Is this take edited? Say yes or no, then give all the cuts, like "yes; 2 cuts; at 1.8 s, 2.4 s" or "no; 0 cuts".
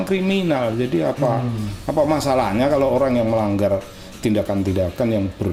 no; 0 cuts